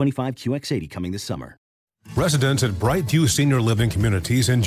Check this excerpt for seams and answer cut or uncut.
cut